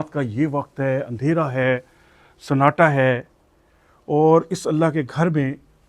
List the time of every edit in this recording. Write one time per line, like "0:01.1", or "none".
none